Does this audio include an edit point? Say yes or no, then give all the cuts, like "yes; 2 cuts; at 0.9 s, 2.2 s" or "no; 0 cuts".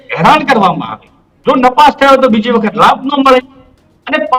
no; 0 cuts